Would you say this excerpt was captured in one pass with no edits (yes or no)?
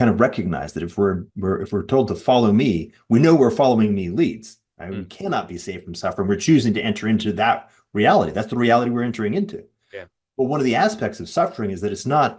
yes